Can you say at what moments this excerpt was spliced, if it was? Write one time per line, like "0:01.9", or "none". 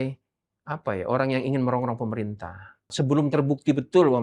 0:02.9